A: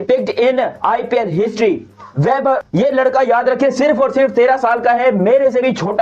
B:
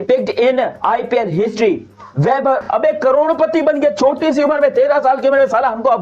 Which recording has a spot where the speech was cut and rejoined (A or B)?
B